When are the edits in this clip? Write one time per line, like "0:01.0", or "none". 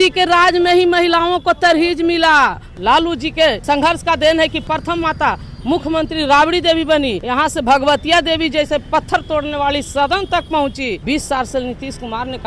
0:02.7
0:03.6
0:04.6
0:07.2
0:11.0

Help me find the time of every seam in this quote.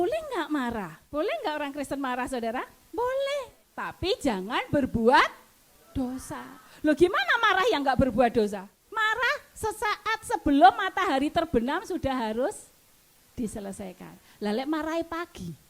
0:01.0
0:03.6
0:08.8

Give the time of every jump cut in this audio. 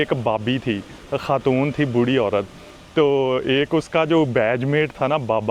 0:00.9

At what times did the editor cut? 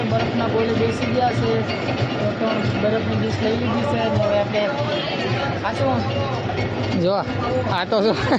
none

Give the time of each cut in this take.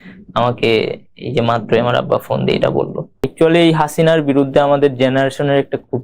0:03.2

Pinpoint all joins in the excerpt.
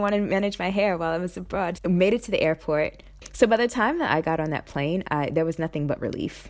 0:01.8
0:03.2

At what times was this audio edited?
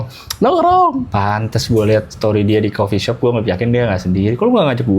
0:01.1
0:02.1

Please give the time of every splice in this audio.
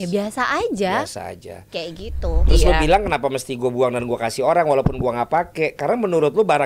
0:02.4

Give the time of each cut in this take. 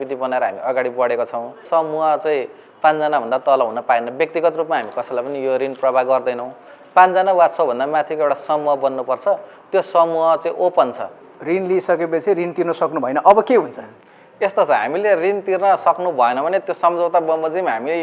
0:01.6
0:11.3

